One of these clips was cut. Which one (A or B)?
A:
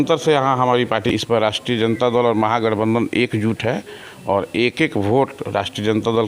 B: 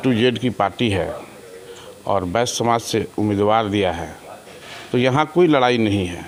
A